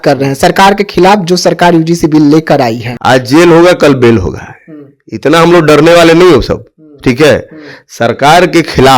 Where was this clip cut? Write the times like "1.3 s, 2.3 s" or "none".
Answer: 2.9 s